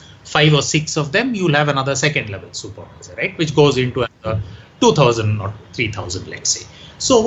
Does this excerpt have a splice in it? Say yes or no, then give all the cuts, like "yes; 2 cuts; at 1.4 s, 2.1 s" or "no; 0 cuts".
no; 0 cuts